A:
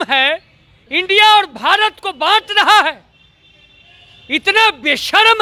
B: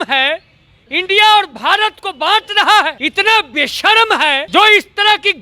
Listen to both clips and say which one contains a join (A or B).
B